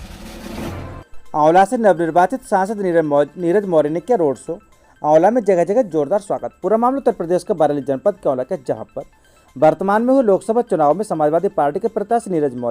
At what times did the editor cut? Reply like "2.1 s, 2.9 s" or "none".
1.2 s

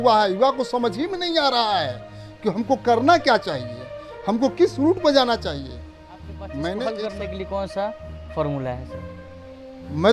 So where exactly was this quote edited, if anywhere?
7.0 s

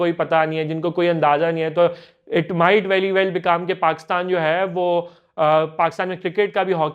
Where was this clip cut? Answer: none

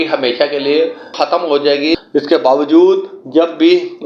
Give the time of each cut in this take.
2.0 s

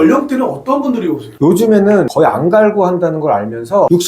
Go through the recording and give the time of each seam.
1.4 s

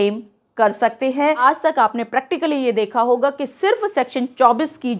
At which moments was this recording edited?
1.4 s

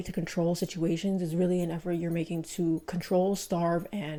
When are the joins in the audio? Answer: none

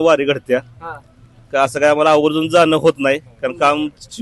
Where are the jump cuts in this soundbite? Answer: none

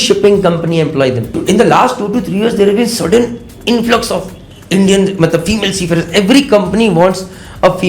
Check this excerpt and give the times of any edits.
1.3 s

